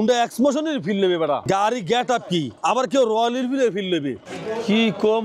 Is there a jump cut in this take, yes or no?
yes